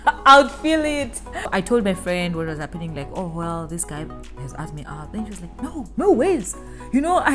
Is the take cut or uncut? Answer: cut